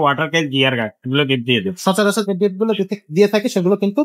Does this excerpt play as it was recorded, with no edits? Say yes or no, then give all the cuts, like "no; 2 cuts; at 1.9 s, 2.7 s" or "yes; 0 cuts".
yes; 0 cuts